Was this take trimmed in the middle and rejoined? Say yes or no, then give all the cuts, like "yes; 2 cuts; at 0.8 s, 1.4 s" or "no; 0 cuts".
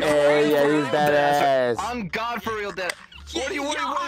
no; 0 cuts